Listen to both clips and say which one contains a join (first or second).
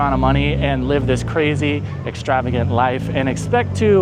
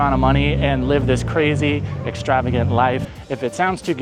second